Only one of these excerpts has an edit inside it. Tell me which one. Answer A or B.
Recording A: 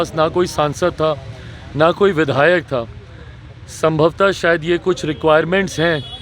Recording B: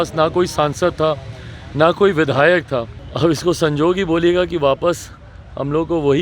B